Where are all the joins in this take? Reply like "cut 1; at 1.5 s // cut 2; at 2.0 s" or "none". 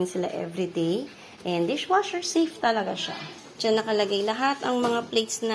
cut 1; at 3.8 s